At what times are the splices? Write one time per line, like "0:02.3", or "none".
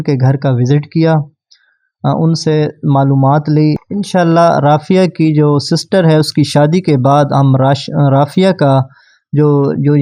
0:03.8